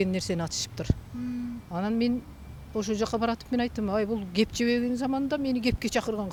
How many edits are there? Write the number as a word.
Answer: zero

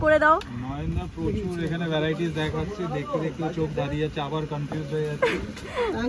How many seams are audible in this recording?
zero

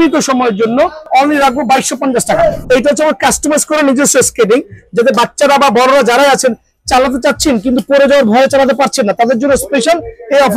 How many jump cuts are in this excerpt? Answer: two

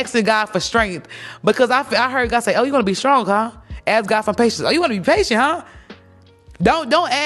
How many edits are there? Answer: zero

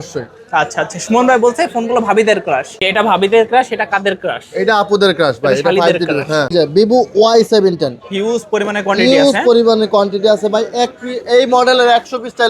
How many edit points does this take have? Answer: two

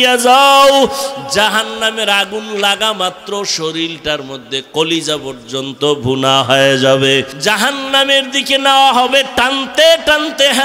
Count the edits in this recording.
one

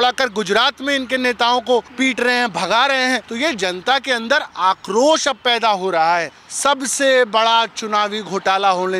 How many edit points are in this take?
three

